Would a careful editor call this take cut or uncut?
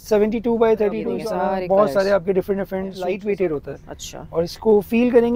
cut